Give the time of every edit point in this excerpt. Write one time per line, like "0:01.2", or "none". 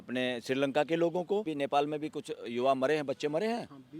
0:01.5